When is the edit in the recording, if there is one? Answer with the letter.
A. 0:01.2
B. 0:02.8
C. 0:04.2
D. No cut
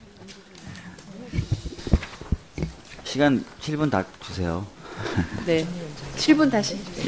D